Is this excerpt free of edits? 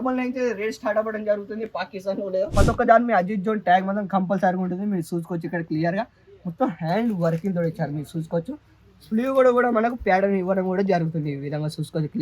no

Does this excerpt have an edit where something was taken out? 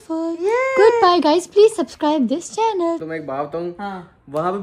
yes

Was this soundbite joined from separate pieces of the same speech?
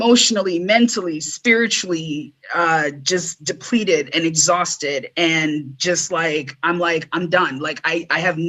no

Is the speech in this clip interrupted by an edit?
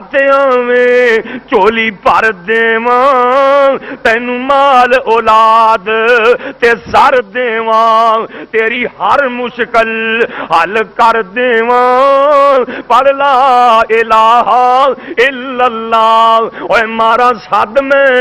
no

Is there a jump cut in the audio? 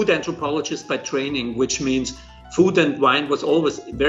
no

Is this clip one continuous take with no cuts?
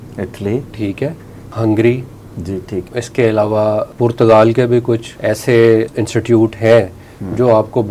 no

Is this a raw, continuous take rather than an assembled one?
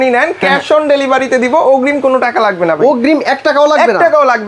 yes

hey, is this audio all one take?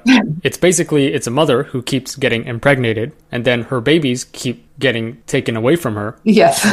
yes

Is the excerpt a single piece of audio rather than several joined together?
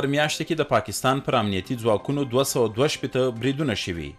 yes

